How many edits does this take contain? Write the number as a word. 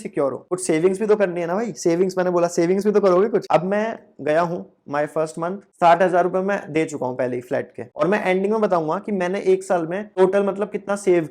two